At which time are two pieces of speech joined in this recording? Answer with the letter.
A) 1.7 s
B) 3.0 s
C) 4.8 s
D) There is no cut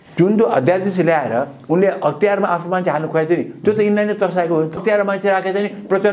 C